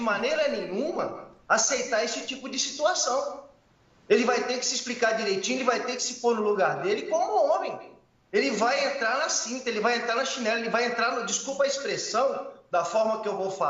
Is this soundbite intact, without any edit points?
no; 1 cut; at 12.5 s

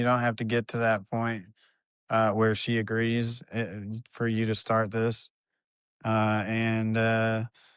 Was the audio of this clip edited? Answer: no; 0 cuts

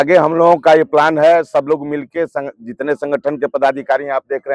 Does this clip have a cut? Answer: no; 0 cuts

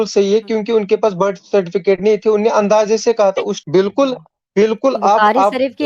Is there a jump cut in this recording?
yes; 1 cut; at 3.6 s

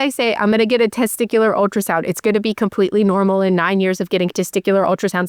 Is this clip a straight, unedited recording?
yes; 0 cuts

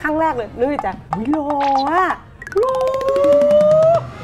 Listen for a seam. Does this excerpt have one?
no; 0 cuts

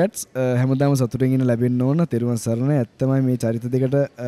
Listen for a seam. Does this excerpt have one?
no; 0 cuts

